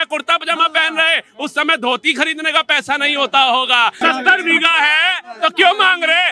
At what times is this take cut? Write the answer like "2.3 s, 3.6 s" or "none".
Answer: 4.0 s